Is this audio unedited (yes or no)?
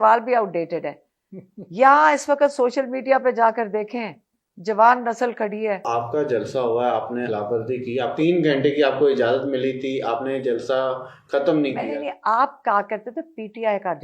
no